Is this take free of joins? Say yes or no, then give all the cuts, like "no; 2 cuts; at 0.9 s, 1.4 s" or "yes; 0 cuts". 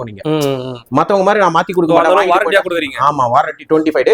yes; 0 cuts